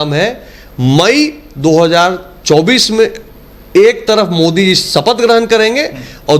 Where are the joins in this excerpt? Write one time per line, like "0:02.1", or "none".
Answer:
none